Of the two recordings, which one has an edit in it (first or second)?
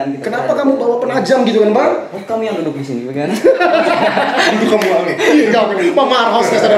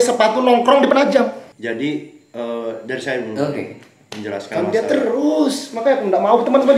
second